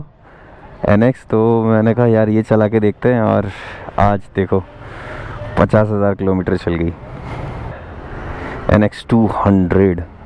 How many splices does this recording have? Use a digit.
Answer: 0